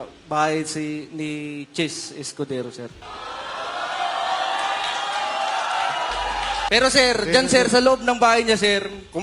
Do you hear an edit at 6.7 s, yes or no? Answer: yes